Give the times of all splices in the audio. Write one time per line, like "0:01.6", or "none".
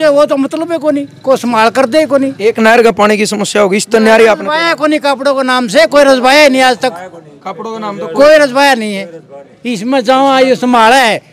none